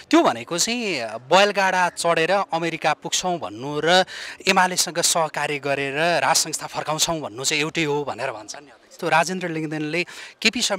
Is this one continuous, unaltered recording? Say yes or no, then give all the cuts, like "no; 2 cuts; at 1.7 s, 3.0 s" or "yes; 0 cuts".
no; 1 cut; at 8.9 s